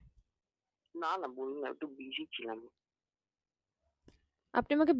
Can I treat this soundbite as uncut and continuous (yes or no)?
yes